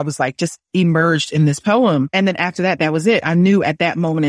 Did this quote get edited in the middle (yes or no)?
no